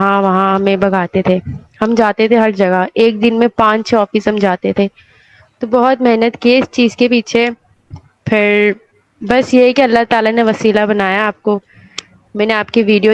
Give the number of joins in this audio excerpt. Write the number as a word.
zero